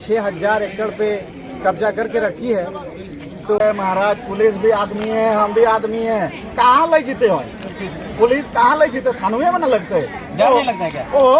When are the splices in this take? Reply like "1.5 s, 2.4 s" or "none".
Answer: 3.6 s